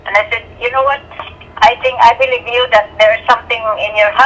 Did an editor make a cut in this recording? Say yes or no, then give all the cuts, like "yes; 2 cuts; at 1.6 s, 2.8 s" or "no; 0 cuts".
no; 0 cuts